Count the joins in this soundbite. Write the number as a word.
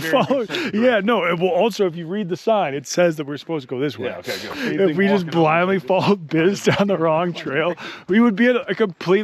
one